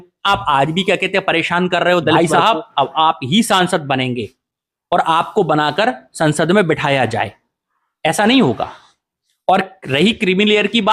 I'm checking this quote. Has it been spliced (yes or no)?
yes